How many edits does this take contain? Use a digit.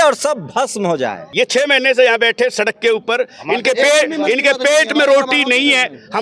1